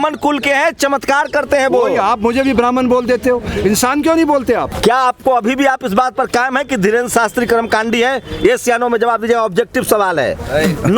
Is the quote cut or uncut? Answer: cut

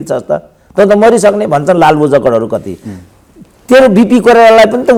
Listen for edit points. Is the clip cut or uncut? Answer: uncut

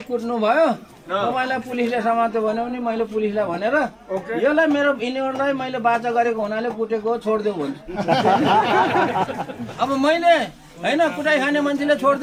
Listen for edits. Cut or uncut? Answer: uncut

